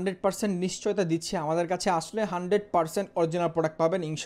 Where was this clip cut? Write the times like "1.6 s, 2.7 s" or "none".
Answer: none